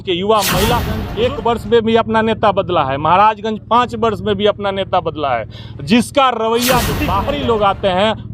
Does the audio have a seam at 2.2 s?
no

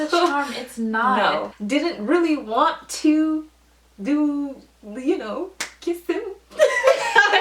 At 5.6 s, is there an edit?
no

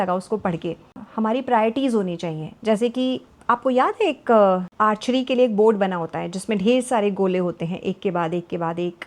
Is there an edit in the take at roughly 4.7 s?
no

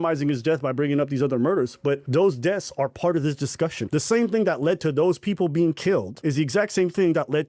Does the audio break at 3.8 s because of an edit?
yes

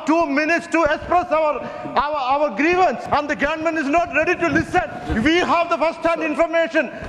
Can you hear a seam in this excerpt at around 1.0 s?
no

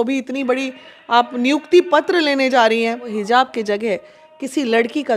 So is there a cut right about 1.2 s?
no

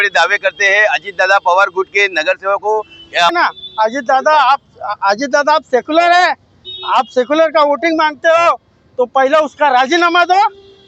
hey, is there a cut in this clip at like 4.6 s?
no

